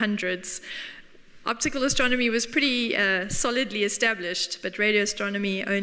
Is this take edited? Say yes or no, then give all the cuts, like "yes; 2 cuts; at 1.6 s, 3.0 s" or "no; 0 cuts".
no; 0 cuts